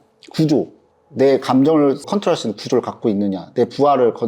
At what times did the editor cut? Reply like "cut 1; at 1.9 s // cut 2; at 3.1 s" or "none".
cut 1; at 2.1 s